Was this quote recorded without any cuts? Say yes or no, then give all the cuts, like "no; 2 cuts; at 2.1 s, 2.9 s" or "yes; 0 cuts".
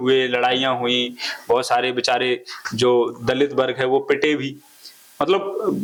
yes; 0 cuts